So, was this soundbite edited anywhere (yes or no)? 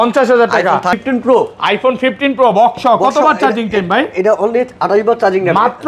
yes